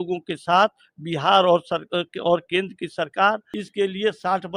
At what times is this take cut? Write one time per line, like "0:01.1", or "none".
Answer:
0:03.6